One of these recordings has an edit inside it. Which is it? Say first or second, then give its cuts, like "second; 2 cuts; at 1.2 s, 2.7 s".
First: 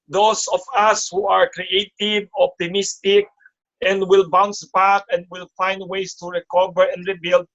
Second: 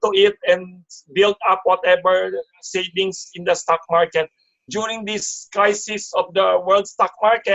second; 1 cut; at 4.6 s